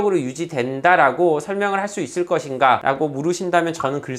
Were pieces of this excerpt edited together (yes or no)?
no